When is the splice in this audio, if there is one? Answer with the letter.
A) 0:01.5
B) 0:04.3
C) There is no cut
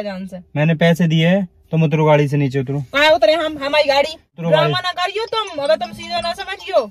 B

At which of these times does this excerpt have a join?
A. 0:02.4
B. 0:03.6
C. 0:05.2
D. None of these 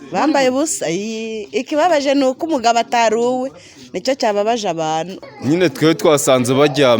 C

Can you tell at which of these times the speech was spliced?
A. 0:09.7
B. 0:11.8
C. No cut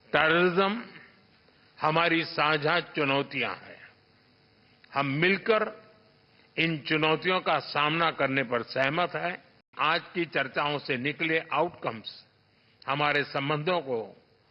A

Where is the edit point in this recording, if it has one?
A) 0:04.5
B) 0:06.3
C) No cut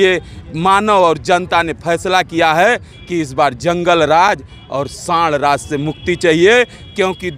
C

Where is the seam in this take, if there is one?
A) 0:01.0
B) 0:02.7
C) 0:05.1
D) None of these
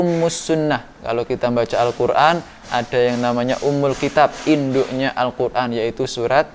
D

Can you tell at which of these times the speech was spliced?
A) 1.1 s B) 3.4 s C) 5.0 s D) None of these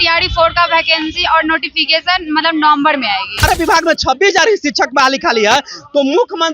B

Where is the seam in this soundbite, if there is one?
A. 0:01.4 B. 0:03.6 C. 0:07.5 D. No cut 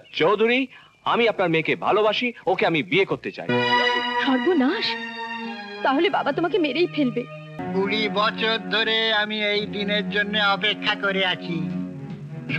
C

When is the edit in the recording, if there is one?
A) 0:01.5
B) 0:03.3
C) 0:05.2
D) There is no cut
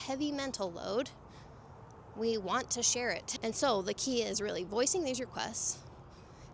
B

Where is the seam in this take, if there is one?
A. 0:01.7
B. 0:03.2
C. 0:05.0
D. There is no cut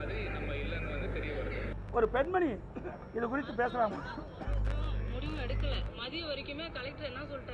A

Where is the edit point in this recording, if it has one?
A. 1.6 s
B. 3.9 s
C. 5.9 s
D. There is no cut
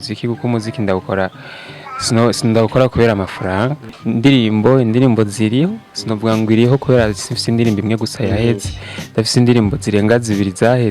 B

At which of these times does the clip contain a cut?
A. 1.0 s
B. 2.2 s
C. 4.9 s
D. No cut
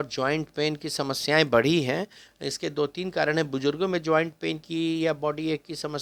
D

